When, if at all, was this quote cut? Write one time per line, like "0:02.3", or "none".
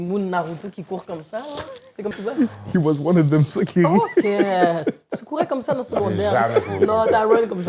0:02.1